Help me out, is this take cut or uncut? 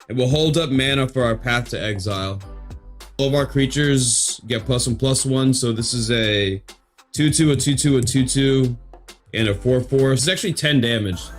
cut